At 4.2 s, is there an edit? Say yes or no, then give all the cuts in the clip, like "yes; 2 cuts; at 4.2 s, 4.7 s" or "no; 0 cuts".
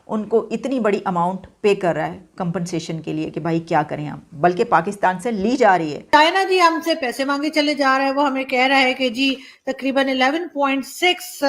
no; 1 cut; at 6.0 s